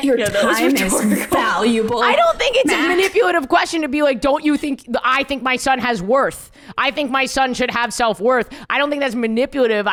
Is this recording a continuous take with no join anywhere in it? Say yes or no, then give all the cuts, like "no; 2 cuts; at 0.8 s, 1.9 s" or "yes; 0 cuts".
yes; 0 cuts